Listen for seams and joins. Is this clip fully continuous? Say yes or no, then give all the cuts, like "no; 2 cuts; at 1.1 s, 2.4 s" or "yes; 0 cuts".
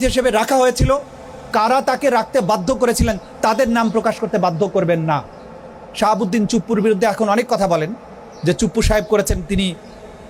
yes; 0 cuts